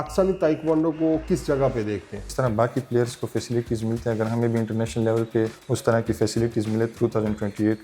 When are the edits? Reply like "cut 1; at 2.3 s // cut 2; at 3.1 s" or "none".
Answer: cut 1; at 2.3 s // cut 2; at 5.6 s // cut 3; at 6.9 s